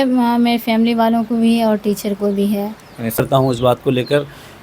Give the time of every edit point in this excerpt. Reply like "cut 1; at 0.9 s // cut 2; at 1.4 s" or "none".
cut 1; at 3.2 s